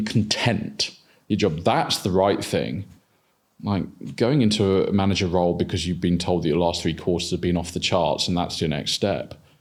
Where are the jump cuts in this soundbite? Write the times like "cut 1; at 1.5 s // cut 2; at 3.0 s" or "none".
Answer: none